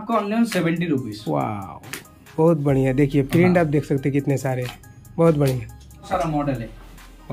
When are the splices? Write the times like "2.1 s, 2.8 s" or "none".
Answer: 6.0 s